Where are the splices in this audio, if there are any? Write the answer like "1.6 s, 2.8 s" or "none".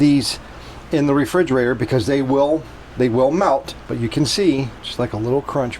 4.8 s